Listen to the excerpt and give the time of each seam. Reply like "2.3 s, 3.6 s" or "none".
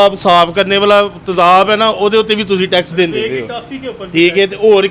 none